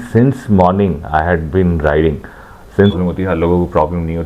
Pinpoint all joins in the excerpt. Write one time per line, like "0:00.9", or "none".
0:03.0

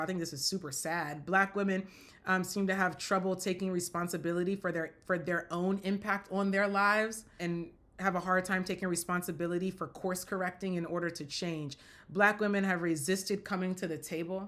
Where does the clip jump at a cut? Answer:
none

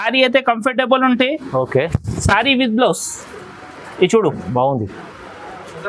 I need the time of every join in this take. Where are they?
none

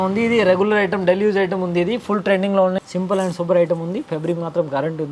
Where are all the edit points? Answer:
0:02.8

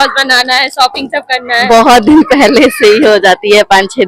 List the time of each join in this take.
none

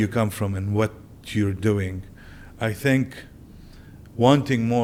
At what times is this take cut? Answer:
none

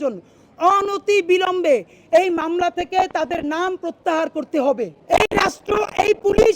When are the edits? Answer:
0:04.9

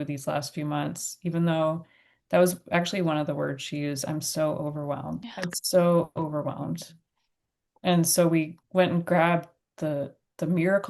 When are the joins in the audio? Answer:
0:05.3
0:08.6

